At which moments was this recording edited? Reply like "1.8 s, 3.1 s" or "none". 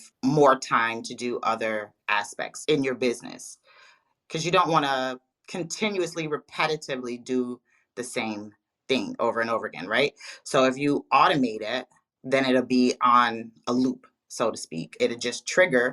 2.5 s